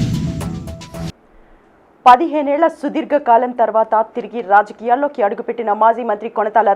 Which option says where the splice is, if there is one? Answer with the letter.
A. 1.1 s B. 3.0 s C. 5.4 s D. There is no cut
A